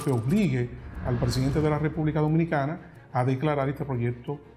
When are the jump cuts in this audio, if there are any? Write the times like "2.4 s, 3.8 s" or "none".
none